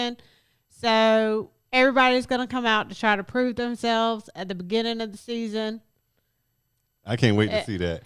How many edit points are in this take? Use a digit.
0